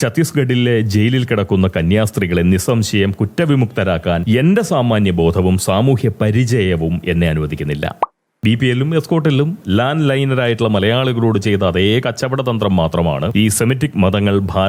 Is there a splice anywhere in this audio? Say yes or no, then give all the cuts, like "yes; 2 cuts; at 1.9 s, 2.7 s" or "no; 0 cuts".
yes; 1 cut; at 8.0 s